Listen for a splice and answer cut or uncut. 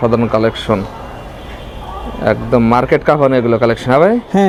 uncut